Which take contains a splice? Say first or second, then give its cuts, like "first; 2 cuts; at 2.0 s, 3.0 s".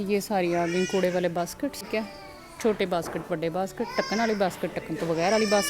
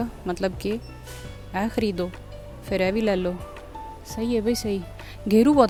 first; 1 cut; at 1.9 s